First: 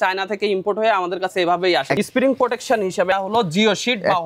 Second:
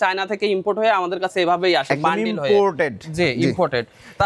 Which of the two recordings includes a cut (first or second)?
first